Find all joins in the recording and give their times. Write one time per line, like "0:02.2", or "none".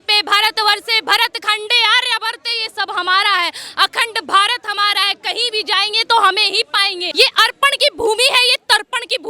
0:07.0